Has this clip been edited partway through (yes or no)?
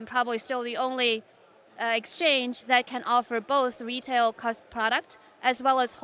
no